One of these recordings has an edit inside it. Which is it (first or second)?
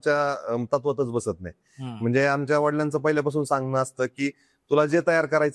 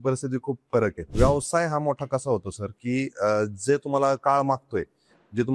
second